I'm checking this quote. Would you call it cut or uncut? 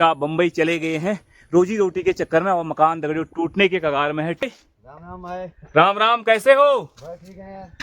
cut